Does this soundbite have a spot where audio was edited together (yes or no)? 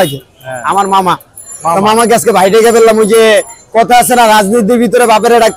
no